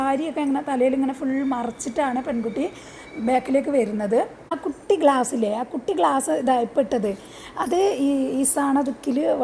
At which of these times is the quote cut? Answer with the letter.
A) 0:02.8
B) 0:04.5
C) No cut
B